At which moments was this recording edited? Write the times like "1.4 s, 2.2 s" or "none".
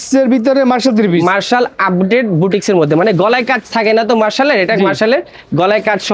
none